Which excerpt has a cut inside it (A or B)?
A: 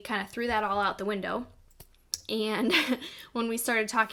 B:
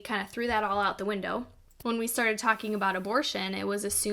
B